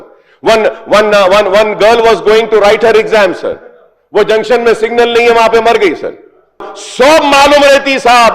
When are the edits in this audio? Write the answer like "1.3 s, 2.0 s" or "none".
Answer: 6.8 s